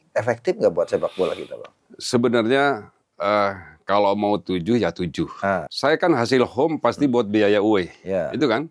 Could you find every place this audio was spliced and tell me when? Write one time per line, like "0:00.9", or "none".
0:05.7

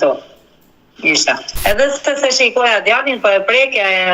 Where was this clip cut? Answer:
0:01.5

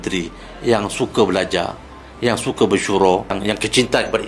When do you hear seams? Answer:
0:03.4

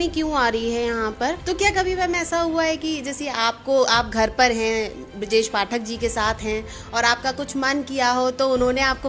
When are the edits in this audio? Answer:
0:01.4

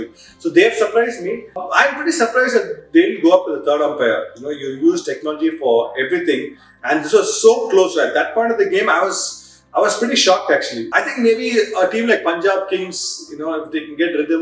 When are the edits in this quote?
0:01.6
0:10.9

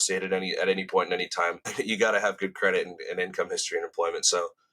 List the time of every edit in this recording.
0:01.6

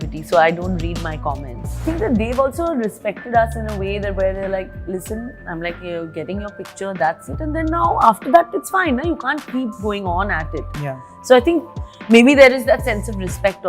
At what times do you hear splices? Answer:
0:01.8

